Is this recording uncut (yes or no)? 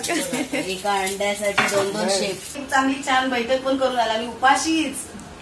no